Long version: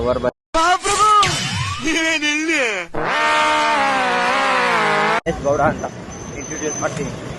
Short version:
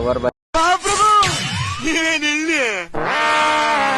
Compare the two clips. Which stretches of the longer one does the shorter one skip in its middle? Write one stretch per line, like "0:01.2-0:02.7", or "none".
none

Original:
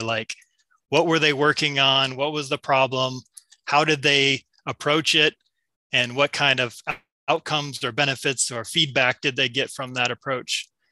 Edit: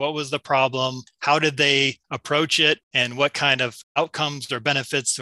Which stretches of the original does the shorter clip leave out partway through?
0:03.3-0:03.5
0:04.5-0:04.6
0:05.4-0:05.9
0:06.8-0:07.1

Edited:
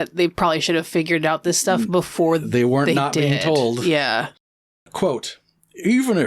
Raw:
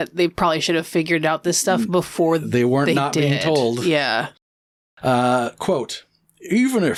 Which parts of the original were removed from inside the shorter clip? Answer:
0:04.9-0:05.6

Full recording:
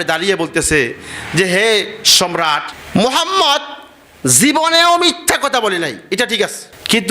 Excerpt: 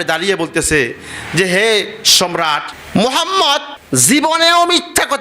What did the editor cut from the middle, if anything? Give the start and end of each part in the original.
0:03.7-0:04.1

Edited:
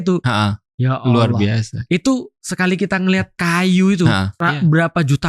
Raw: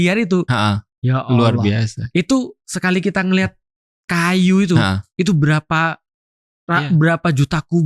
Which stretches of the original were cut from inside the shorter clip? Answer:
0:03.6-0:04.0
0:05.0-0:06.6

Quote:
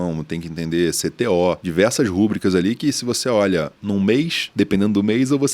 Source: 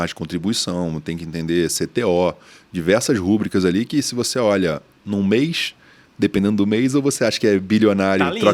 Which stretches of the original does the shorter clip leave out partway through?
0:02.4-0:02.7
0:04.9-0:05.0
0:05.6-0:06.0

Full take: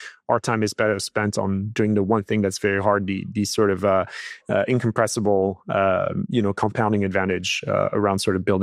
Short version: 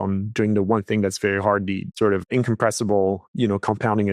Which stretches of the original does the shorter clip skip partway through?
0:03.3-0:04.2
0:05.6-0:06.2

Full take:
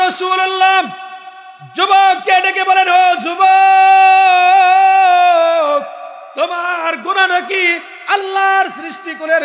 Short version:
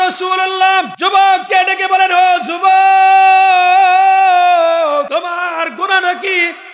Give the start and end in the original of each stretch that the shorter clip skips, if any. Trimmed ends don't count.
0:00.9-0:01.7
0:05.8-0:06.3

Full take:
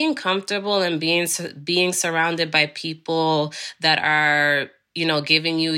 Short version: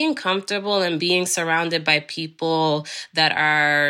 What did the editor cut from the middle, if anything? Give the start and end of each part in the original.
0:01.0-0:01.7

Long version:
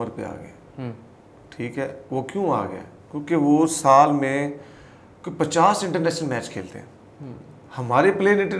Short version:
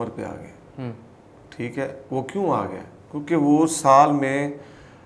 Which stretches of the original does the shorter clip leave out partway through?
none

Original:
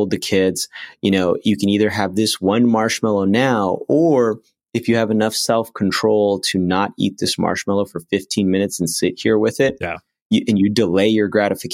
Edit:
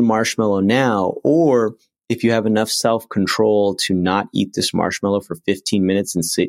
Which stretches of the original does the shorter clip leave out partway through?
none

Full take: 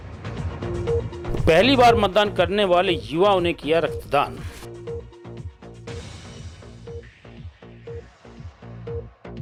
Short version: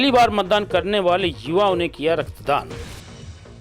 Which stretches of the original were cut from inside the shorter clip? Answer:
0:04.3-0:05.8

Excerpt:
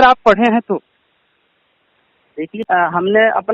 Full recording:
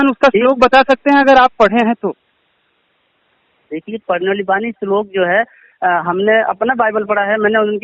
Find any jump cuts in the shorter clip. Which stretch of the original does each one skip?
0:03.9-0:05.7

